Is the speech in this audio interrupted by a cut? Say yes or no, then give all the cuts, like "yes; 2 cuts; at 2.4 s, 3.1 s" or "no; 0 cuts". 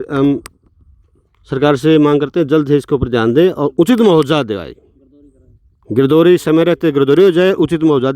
no; 0 cuts